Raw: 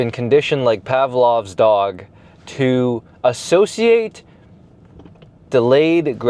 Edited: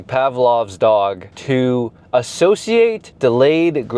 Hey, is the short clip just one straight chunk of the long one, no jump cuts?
no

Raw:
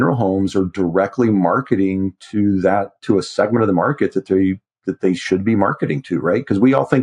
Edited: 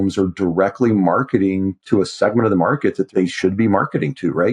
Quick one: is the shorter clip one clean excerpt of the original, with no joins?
no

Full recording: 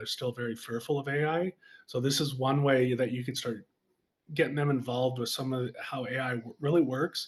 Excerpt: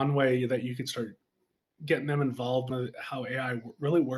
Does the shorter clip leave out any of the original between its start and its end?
yes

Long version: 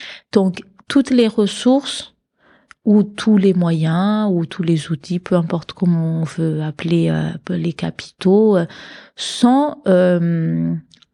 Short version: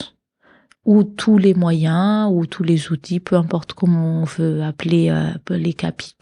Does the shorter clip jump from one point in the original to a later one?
no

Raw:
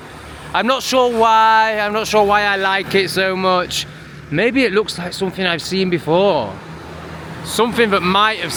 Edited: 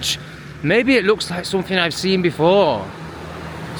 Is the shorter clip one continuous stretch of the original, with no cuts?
yes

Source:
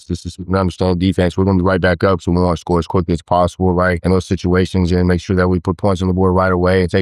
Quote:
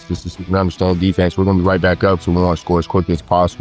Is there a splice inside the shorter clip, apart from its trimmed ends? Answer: no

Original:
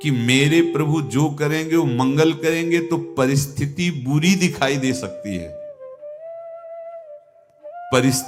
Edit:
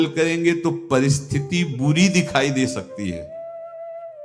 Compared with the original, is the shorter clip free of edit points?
no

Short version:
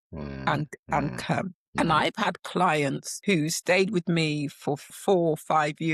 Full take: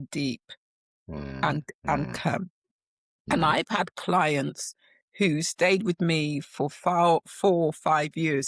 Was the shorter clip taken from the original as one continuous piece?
no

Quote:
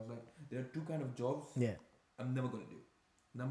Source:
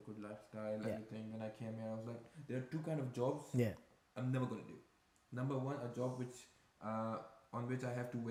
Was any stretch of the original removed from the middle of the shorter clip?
no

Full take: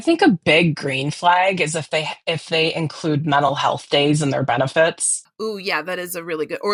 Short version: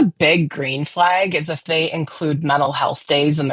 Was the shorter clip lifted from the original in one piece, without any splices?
no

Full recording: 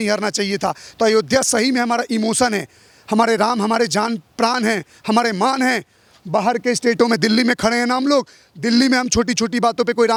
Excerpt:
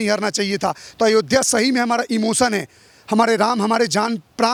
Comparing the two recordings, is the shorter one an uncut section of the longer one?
yes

